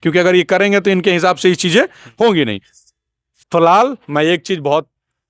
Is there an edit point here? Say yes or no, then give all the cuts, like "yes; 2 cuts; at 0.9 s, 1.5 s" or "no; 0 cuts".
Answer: no; 0 cuts